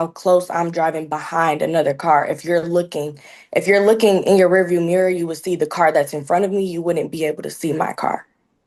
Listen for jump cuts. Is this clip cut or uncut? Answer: uncut